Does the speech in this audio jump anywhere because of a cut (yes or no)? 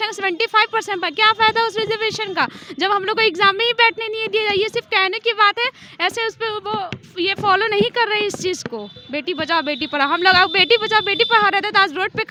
no